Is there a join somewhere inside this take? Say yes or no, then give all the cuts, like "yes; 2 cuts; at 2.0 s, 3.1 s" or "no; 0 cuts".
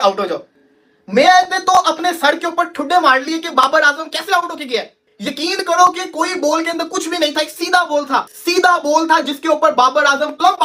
no; 0 cuts